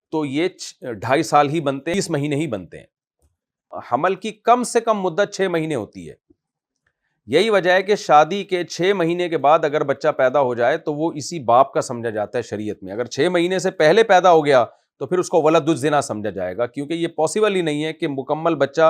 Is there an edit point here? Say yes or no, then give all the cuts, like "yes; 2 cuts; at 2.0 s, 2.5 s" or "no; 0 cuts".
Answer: yes; 2 cuts; at 1.9 s, 3.8 s